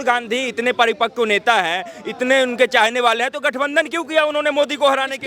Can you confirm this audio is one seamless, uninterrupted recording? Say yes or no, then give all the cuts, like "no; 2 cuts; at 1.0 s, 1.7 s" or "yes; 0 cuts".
yes; 0 cuts